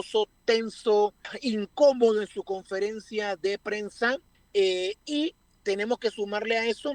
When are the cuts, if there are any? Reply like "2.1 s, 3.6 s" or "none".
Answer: 1.3 s, 4.3 s, 5.5 s